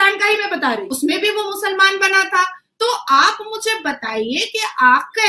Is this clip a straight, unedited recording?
no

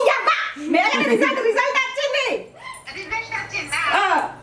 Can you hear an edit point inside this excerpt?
no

